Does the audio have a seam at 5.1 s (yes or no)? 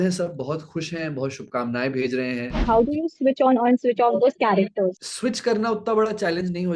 yes